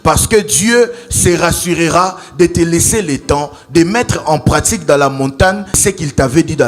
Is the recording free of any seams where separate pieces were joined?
no; 1 cut; at 5.8 s

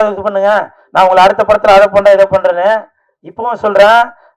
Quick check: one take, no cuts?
yes; 0 cuts

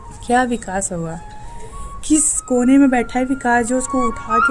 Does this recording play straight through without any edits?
yes; 0 cuts

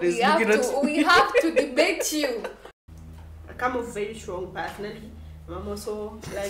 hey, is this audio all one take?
no; 1 cut; at 2.6 s

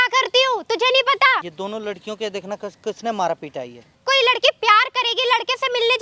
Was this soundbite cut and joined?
yes; 2 cuts; at 1.4 s, 4.0 s

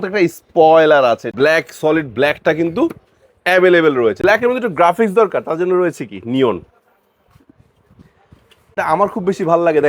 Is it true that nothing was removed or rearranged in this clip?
no; 3 cuts; at 1.3 s, 4.2 s, 8.7 s

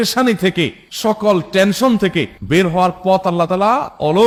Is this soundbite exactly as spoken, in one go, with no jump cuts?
yes; 0 cuts

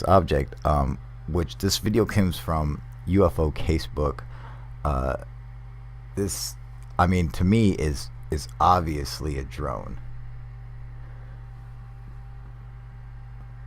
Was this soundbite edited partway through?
yes; 1 cut; at 12.3 s

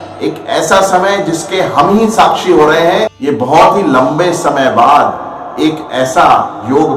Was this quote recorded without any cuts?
no; 1 cut; at 3.1 s

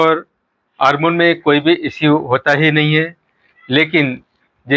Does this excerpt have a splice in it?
no; 0 cuts

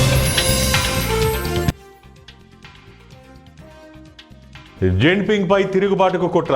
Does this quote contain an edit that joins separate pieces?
yes; 1 cut; at 4.8 s

